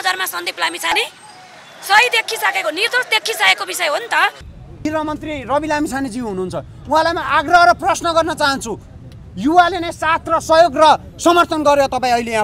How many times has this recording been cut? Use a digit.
1